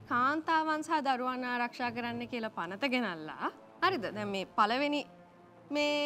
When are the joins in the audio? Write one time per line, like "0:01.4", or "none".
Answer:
none